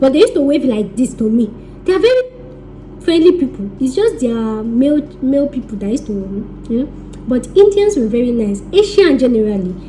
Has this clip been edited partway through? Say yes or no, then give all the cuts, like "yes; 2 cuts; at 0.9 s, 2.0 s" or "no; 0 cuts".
no; 0 cuts